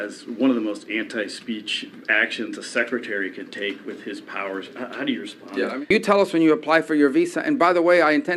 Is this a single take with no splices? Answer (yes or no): no